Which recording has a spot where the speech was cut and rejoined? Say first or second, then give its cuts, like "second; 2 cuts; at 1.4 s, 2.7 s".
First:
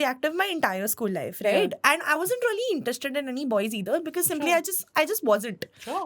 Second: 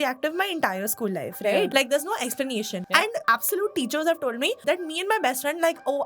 second; 3 cuts; at 1.7 s, 3.1 s, 4.6 s